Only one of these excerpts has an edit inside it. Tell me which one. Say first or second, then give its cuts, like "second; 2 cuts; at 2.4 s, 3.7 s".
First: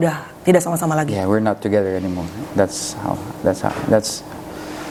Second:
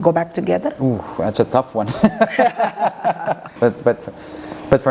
second; 1 cut; at 3.5 s